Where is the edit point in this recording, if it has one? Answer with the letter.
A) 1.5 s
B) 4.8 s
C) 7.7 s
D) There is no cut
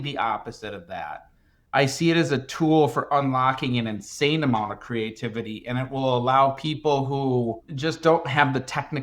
C